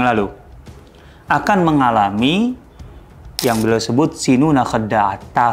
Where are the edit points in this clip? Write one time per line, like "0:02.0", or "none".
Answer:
none

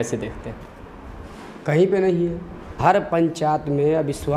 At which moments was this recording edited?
0:02.8

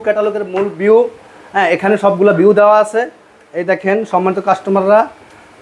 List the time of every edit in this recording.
none

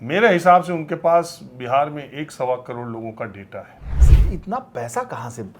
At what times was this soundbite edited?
0:04.1

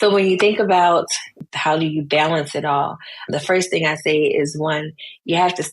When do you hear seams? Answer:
0:01.3

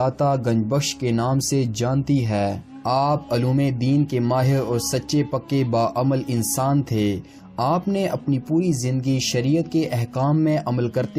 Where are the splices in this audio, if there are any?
none

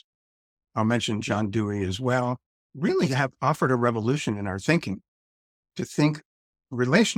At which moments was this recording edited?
none

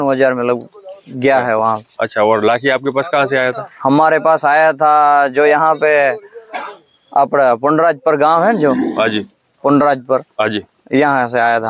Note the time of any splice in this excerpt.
none

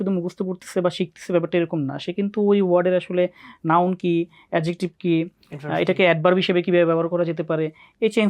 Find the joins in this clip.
none

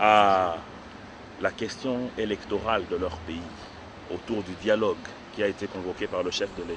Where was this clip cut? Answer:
none

